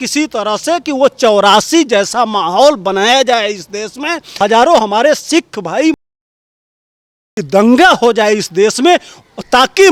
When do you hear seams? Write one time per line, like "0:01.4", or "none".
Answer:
none